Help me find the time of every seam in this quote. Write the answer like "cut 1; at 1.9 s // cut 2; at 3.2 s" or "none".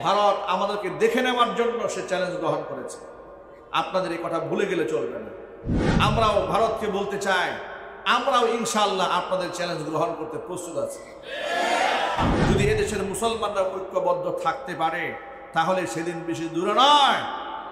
none